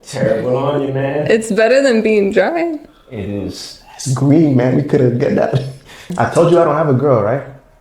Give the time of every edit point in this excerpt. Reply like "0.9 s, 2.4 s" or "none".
6.0 s